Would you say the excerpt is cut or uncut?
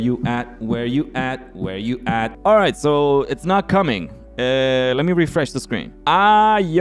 uncut